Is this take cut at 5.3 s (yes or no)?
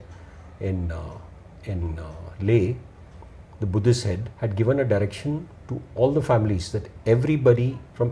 no